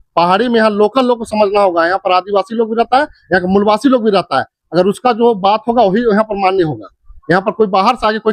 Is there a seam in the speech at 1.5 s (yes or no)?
no